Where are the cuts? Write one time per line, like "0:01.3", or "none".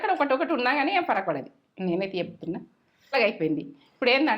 0:03.1